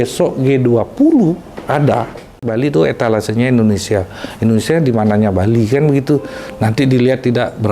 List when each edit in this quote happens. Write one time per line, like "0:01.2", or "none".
0:02.5

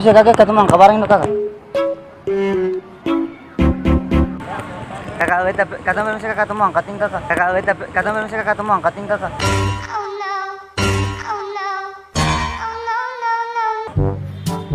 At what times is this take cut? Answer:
none

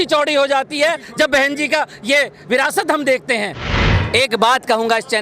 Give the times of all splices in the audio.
0:03.8

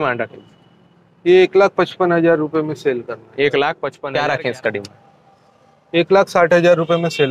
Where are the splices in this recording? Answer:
0:03.9

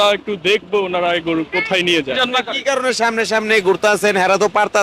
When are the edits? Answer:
0:02.2

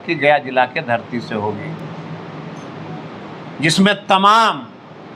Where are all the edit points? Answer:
none

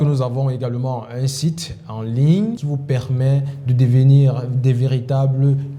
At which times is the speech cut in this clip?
0:02.6

